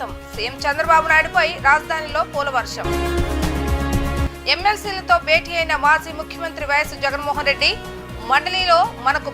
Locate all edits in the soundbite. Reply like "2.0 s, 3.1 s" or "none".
none